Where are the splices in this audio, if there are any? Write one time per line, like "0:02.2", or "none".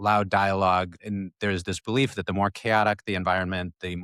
0:01.0